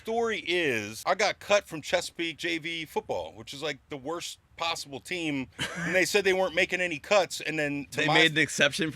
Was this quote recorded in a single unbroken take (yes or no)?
no